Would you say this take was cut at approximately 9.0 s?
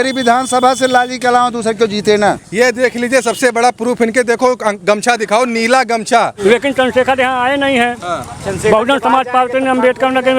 no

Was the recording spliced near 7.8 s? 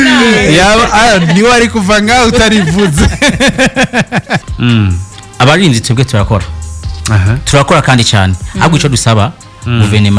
no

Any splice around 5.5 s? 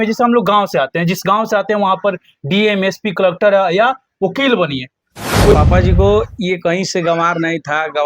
yes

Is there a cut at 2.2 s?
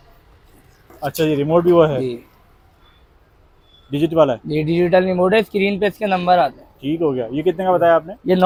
no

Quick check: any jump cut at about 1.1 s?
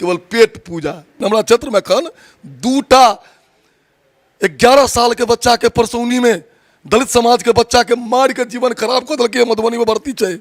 yes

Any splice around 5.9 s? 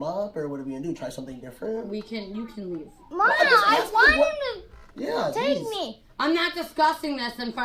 no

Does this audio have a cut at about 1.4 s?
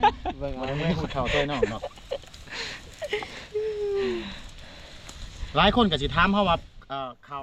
no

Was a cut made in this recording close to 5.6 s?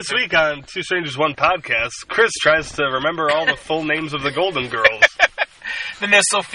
no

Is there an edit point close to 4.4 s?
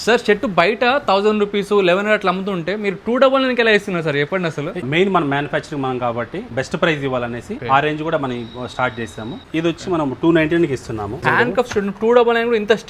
no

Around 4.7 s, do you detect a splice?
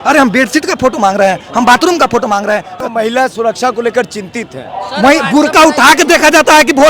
no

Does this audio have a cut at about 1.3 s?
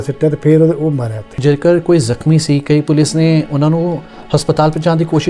yes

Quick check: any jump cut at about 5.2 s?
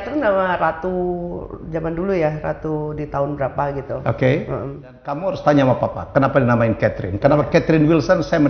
yes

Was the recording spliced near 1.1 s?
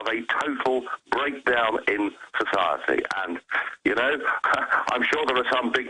no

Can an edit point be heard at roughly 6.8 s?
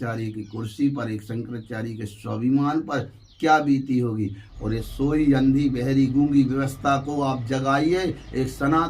no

